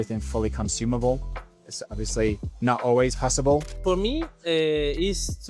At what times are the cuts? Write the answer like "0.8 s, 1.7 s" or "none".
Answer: 2.5 s, 3.7 s